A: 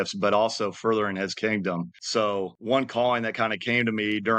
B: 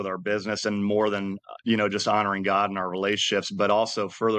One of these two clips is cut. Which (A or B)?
A